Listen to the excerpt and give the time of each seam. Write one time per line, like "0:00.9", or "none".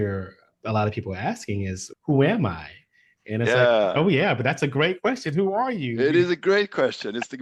none